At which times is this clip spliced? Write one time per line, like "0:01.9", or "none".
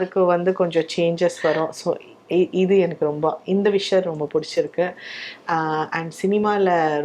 none